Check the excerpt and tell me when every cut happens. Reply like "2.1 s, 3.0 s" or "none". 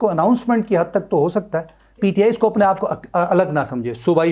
2.0 s